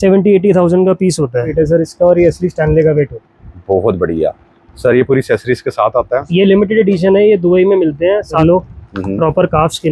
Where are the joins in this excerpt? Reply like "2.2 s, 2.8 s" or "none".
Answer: 1.5 s, 8.4 s